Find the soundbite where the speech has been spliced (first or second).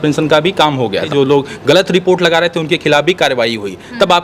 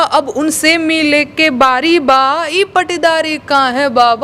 first